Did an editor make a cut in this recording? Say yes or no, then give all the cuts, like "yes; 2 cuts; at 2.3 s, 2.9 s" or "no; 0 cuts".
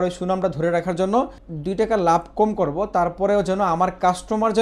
yes; 1 cut; at 1.5 s